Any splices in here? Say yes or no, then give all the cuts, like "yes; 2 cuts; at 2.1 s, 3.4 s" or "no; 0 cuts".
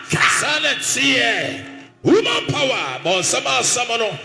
no; 0 cuts